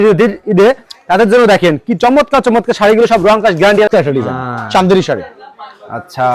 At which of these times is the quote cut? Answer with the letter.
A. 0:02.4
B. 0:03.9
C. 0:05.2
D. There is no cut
B